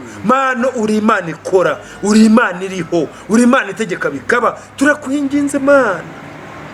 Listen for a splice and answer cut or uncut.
uncut